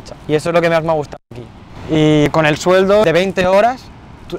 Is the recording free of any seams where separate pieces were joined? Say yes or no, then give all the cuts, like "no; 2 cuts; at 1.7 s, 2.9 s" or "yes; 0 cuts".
no; 1 cut; at 3.0 s